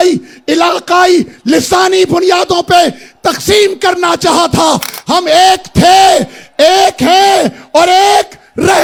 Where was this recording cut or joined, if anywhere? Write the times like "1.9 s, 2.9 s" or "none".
none